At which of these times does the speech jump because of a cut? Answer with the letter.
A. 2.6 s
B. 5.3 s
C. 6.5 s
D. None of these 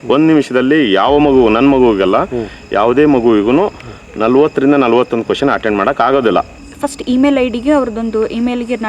C